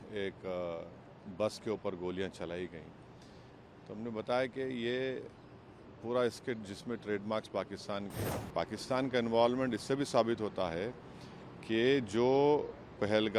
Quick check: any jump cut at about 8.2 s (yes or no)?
yes